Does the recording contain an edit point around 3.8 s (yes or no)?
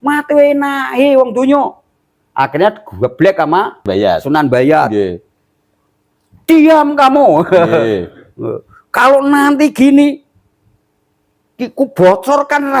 yes